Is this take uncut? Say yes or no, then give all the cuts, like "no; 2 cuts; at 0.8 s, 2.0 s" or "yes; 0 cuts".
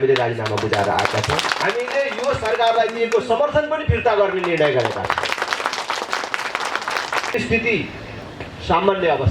no; 2 cuts; at 1.6 s, 7.3 s